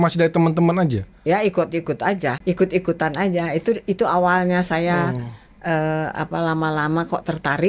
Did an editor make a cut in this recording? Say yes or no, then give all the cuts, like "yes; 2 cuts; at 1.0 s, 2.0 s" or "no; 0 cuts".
yes; 1 cut; at 2.4 s